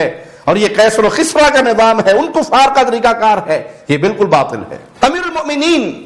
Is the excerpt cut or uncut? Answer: uncut